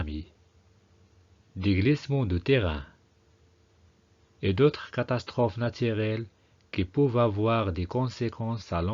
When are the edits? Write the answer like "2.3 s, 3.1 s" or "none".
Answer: 4.7 s